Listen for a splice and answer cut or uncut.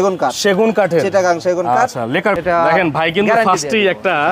cut